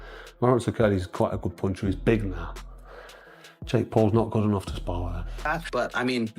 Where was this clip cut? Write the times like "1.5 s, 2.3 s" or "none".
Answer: 5.5 s